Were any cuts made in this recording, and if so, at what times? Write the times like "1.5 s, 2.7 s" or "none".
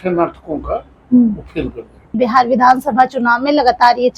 2.1 s